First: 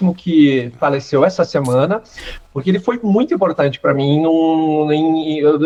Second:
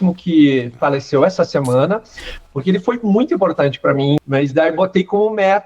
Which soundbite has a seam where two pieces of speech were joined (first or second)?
second